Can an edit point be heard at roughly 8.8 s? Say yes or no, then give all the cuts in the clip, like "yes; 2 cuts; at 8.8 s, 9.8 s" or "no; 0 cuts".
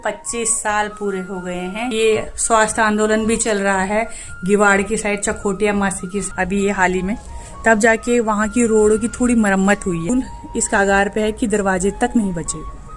no; 3 cuts; at 1.9 s, 6.3 s, 10.1 s